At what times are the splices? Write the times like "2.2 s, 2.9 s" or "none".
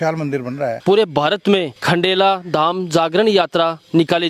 0.8 s, 1.7 s